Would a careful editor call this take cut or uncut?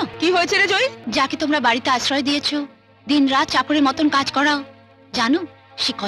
cut